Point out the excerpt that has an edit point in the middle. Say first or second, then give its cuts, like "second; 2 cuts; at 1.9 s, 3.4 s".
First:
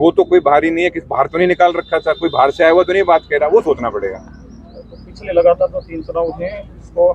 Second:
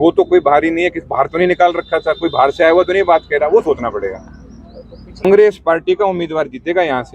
second; 1 cut; at 5.2 s